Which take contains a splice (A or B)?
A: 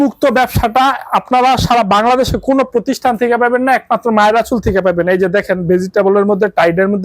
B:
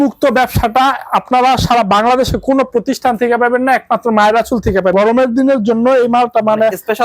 B